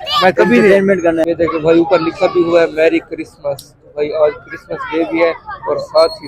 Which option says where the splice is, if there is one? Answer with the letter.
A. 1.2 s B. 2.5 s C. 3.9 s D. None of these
A